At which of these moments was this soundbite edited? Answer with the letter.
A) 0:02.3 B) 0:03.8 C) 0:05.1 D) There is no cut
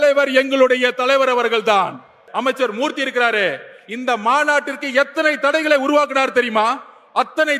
A